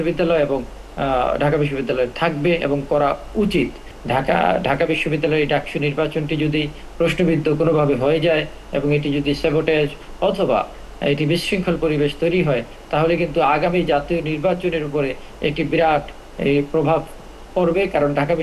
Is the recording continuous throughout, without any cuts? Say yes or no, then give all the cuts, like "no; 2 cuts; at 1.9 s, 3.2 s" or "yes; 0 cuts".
no; 1 cut; at 3.9 s